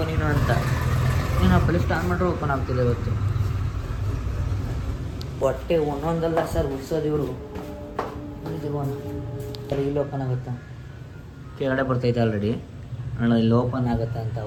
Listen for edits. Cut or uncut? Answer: uncut